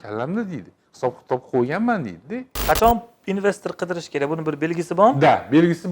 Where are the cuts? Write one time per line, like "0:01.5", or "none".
0:02.5